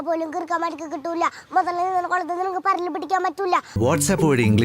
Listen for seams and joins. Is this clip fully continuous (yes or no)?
no